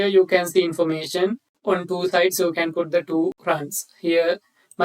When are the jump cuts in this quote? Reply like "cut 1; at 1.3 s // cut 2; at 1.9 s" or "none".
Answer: cut 1; at 1.5 s // cut 2; at 3.4 s